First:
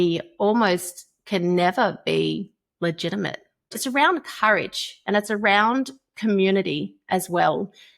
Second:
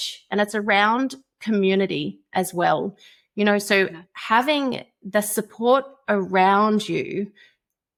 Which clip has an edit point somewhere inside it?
first; 1 cut; at 3.8 s

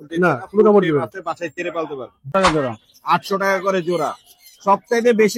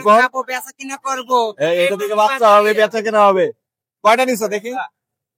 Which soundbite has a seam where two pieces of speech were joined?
first; 1 cut; at 2.3 s

